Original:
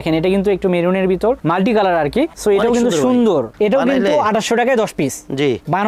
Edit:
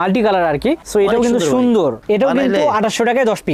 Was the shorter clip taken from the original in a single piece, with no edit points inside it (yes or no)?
yes